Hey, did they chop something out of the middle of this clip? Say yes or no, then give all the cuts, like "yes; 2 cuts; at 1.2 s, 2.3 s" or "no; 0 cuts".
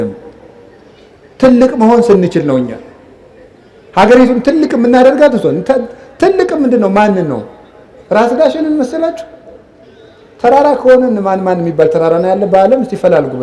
no; 0 cuts